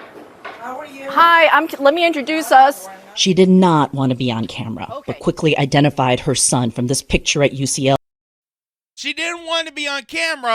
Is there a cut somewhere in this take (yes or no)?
no